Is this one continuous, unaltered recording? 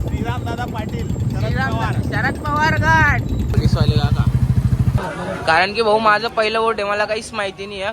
no; 2 cuts; at 3.5 s, 5.0 s

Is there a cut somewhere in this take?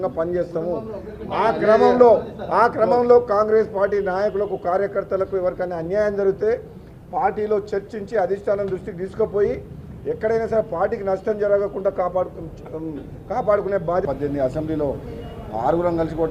yes; 1 cut; at 14.1 s

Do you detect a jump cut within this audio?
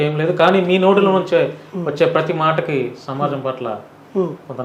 no; 0 cuts

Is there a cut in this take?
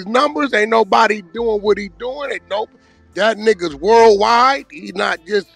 no; 0 cuts

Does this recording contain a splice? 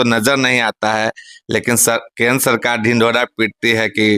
no; 0 cuts

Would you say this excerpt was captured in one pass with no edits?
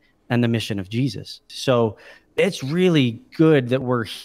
no; 1 cut; at 1.5 s

